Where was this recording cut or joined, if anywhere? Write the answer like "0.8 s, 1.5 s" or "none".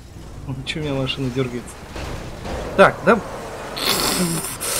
none